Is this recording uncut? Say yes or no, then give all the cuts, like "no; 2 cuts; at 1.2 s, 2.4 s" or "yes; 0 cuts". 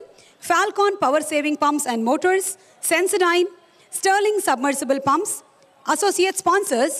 yes; 0 cuts